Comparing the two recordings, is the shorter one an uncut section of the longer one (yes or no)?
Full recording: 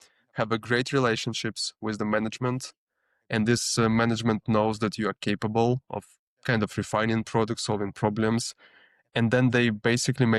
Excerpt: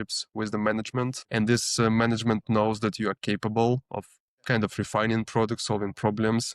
no